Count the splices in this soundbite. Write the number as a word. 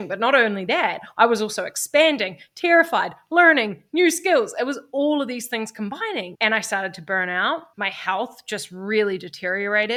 zero